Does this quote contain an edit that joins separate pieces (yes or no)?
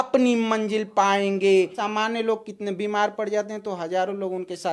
yes